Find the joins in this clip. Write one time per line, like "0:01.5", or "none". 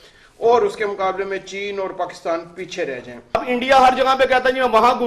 0:03.3